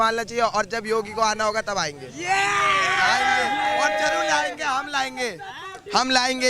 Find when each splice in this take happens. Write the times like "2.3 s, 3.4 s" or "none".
none

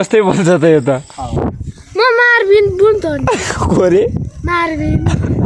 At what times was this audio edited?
3.5 s

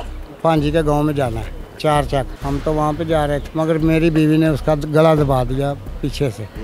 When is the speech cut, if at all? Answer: 2.4 s, 3.5 s

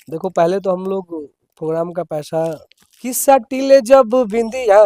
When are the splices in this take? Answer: 3.2 s

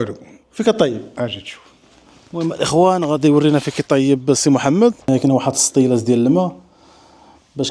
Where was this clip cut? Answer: 5.1 s

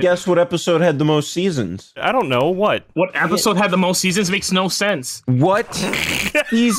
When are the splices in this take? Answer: 2.0 s

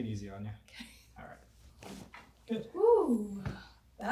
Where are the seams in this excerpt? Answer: 1.7 s

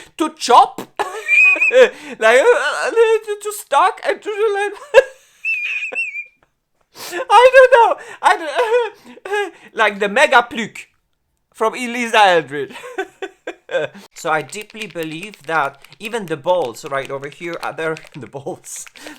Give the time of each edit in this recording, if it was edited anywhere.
14.1 s

